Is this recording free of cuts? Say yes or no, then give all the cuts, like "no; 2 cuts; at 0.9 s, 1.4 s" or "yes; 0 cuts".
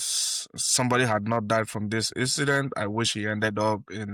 yes; 0 cuts